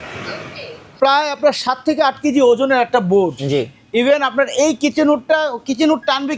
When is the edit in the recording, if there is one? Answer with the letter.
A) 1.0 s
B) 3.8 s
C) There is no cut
A